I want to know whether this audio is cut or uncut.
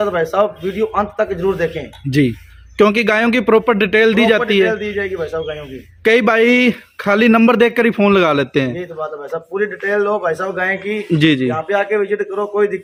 uncut